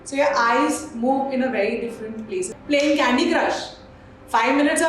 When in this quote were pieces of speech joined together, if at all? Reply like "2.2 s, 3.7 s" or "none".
2.5 s